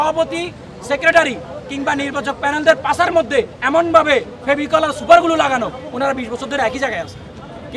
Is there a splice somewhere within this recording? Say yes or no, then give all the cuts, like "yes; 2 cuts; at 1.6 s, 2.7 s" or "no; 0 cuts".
no; 0 cuts